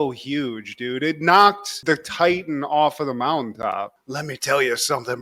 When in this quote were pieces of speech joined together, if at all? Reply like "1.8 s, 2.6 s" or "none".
4.0 s